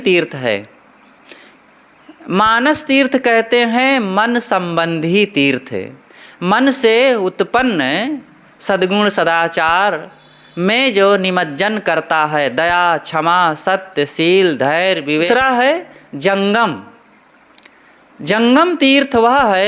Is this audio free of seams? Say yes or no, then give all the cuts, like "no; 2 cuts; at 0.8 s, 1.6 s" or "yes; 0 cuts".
no; 1 cut; at 15.3 s